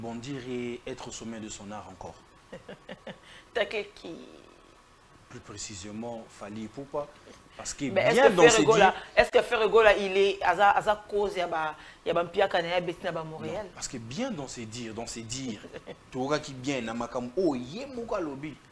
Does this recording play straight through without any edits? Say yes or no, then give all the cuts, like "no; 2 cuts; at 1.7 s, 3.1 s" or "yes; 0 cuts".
yes; 0 cuts